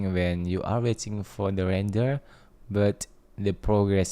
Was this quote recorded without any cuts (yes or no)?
yes